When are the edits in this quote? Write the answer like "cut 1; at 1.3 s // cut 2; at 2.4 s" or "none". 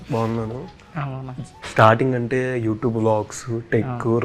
none